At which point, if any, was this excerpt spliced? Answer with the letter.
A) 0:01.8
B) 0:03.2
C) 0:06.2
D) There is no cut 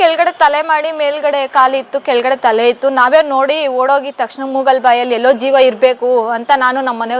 D